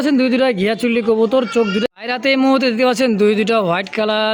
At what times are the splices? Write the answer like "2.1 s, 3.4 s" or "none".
1.8 s